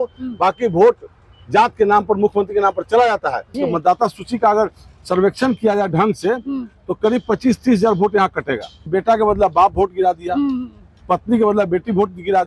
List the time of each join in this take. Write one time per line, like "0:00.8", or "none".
0:03.5
0:08.8